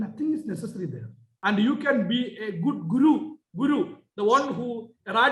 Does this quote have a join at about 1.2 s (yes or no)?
yes